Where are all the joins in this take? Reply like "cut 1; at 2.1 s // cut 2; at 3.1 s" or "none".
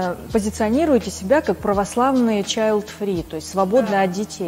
none